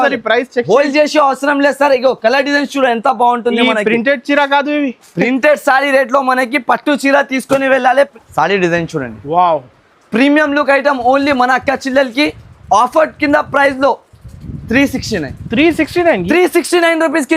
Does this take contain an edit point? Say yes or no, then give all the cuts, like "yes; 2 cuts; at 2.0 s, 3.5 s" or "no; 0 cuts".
yes; 1 cut; at 8.1 s